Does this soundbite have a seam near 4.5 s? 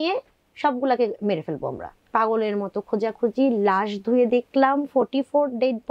no; 1 cut; at 2.0 s

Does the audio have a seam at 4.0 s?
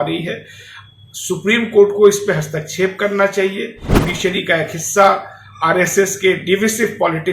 yes; 1 cut; at 4.0 s

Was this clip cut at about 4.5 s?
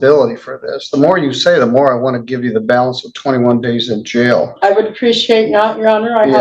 no; 0 cuts

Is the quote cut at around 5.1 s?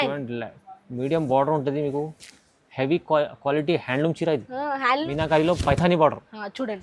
yes; 1 cut; at 5.1 s

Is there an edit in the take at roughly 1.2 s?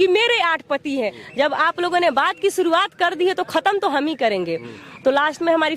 yes; 1 cut; at 1.2 s

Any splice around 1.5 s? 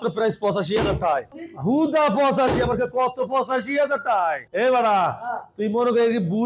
no; 1 cut; at 4.5 s

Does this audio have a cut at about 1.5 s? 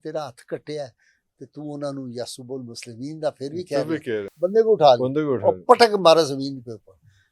no; 1 cut; at 4.3 s

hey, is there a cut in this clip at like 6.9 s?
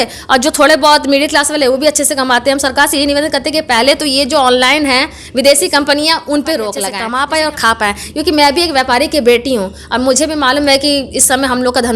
yes; 1 cut; at 6.9 s

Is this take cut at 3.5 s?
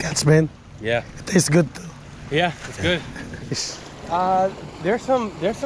yes; 1 cut; at 3.5 s

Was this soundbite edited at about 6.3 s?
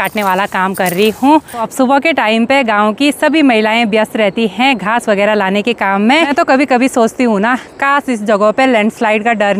yes; 2 cuts; at 1.6 s, 6.3 s

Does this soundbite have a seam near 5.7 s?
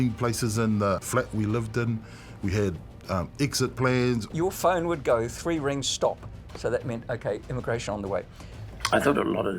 no; 3 cuts; at 1.0 s, 4.3 s, 8.4 s

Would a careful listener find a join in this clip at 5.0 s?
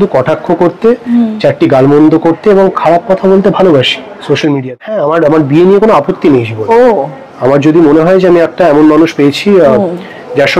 yes; 1 cut; at 5.0 s

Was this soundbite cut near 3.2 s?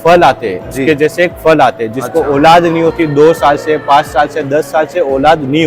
no; 0 cuts

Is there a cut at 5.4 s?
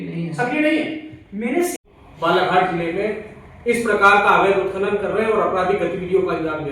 no; 1 cut; at 1.8 s

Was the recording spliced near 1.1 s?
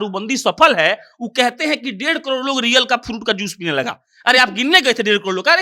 no; 0 cuts

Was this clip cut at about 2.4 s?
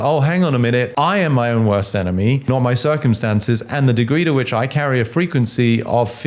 yes; 2 cuts; at 0.9 s, 2.4 s

